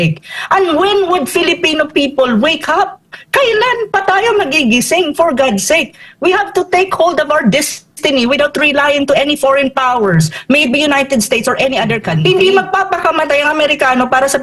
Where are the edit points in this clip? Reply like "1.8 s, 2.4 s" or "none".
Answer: 12.2 s